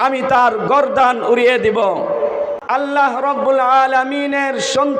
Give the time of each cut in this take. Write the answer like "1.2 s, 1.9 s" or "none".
2.6 s